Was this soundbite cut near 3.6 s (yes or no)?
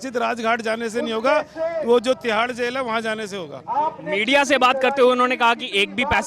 no